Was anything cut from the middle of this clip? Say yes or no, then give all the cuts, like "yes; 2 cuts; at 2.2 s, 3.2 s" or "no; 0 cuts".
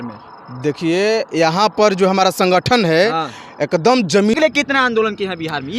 yes; 1 cut; at 4.3 s